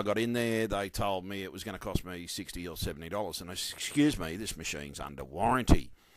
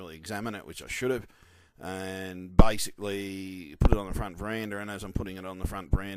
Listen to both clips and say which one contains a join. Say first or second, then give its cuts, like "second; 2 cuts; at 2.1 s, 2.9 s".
first; 1 cut; at 1.8 s